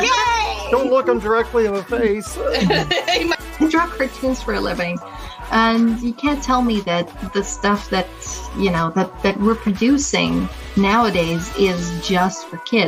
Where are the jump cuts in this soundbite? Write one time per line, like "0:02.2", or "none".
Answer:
none